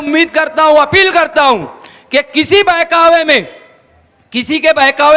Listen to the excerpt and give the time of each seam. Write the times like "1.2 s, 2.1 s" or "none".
none